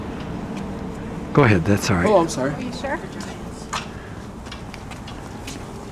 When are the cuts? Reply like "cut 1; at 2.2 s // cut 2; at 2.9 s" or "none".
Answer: cut 1; at 1.5 s